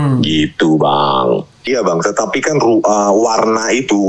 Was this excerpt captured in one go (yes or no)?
no